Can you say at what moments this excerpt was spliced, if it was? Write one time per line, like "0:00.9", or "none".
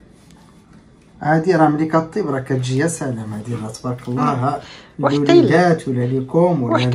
none

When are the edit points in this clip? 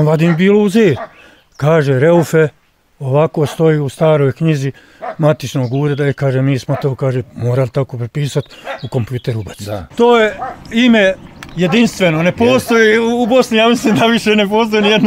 0:09.8

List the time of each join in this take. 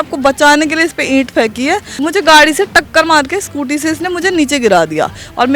0:01.9

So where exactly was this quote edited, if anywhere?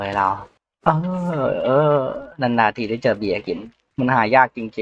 none

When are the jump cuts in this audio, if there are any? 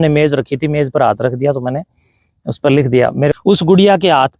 0:03.3

